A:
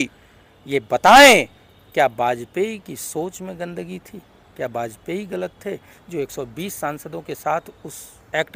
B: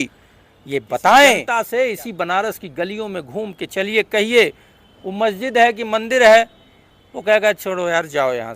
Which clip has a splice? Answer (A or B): B